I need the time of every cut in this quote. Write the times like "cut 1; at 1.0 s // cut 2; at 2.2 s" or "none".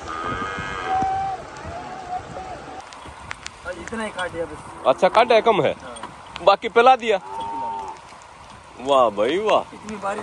cut 1; at 2.8 s